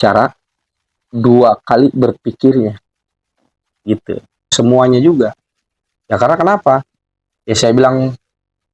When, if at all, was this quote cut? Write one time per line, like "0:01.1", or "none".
0:04.5